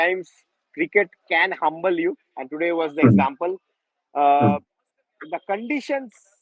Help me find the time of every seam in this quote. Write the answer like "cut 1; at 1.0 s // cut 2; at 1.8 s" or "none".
none